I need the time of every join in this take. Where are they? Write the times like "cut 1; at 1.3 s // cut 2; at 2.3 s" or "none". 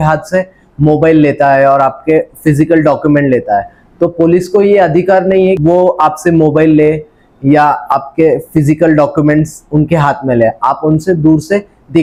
none